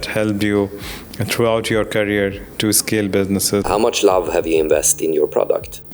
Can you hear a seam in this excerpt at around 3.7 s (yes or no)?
yes